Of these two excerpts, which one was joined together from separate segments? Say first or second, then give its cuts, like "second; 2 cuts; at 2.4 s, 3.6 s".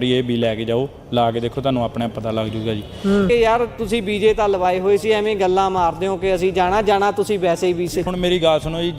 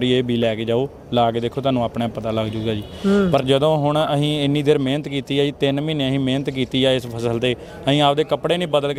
first; 2 cuts; at 3.3 s, 8.1 s